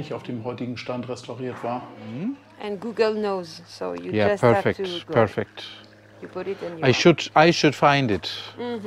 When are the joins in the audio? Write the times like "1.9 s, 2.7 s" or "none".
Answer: 2.2 s